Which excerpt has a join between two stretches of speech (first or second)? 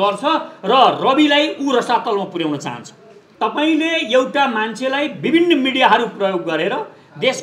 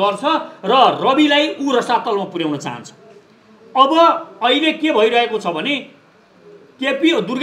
first